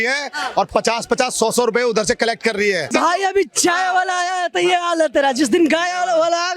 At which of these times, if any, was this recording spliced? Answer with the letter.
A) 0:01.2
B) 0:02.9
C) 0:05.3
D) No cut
B